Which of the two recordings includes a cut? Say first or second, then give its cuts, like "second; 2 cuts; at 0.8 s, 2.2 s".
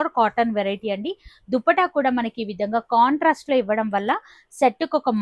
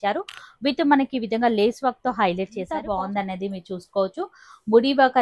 second; 1 cut; at 2.8 s